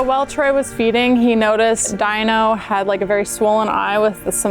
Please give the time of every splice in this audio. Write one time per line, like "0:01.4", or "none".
0:01.9